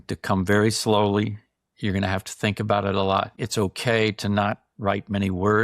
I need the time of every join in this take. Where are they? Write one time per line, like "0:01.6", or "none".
0:03.4